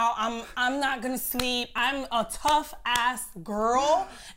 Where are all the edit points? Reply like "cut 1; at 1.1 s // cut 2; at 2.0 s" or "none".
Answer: cut 1; at 1.7 s